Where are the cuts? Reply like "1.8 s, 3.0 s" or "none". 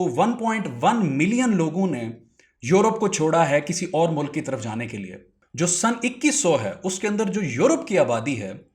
5.4 s